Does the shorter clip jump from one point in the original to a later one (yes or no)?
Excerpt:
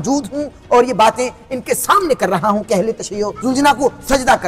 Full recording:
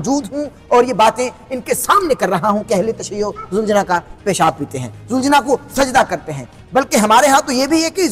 yes